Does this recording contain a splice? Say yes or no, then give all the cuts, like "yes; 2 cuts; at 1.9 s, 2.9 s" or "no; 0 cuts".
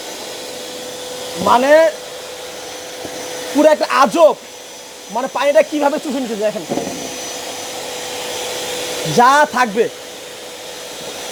no; 0 cuts